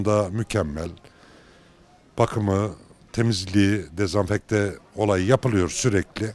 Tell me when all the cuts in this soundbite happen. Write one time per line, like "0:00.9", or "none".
none